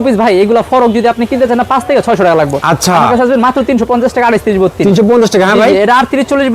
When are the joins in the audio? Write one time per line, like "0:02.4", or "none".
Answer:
none